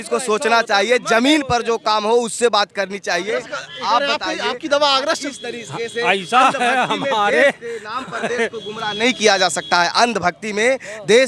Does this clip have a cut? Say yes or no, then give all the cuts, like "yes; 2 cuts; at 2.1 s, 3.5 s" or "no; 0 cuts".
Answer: no; 0 cuts